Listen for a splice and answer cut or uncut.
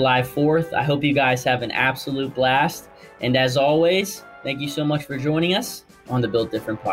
cut